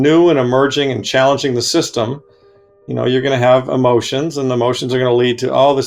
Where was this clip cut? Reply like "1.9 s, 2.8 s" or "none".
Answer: none

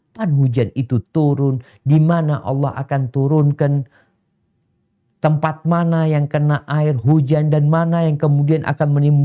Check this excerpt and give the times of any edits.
none

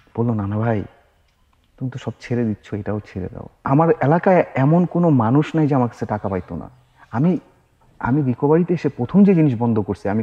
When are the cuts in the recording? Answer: 3.6 s

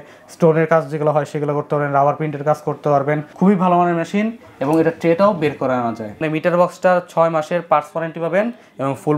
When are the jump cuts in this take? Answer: 3.3 s, 6.2 s

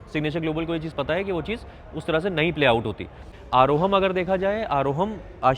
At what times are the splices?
3.3 s

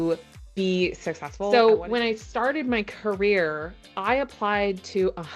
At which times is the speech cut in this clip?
1.3 s

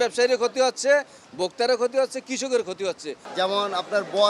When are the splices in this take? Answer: 3.2 s

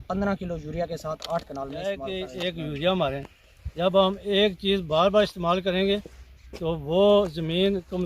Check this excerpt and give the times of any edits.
2.1 s

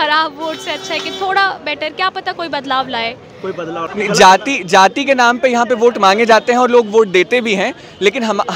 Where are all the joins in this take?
3.8 s

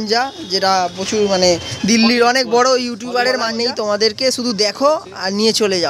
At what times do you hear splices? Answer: 3.5 s

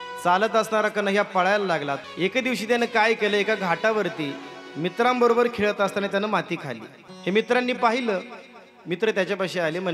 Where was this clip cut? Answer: none

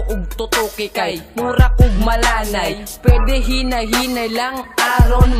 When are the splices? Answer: none

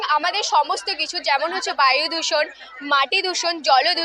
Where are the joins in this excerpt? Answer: none

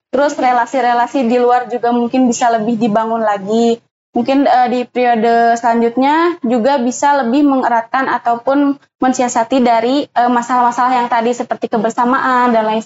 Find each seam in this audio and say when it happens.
none

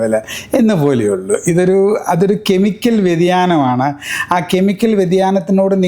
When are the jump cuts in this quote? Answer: none

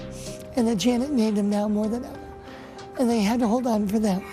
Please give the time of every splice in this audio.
none

